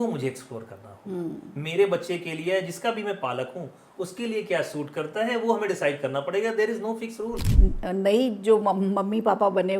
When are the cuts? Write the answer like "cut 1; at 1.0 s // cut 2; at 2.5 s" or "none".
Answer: cut 1; at 7.4 s